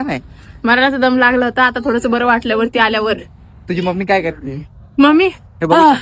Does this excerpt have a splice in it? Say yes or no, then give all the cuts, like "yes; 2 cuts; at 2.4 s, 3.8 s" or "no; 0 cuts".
no; 0 cuts